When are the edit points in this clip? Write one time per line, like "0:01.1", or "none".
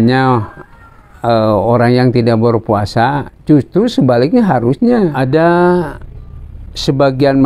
0:05.2